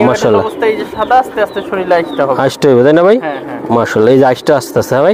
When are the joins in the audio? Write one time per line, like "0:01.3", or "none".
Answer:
none